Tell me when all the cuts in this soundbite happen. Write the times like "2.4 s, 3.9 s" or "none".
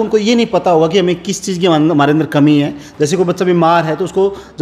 none